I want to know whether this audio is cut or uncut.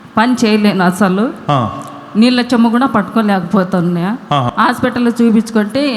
cut